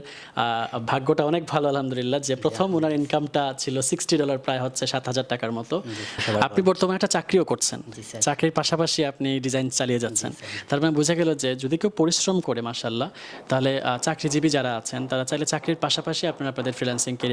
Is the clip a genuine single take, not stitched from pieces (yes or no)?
no